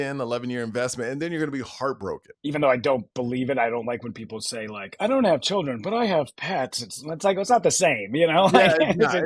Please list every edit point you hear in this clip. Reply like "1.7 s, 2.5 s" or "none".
2.2 s